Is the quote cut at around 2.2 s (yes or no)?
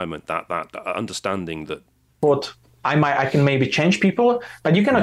yes